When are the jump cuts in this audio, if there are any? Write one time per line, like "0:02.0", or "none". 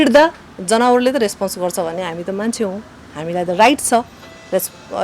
none